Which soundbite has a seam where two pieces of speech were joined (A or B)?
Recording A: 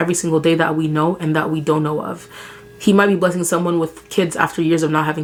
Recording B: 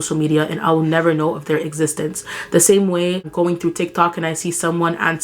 B